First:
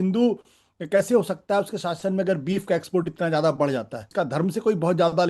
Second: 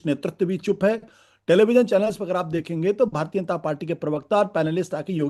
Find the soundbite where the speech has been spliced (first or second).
first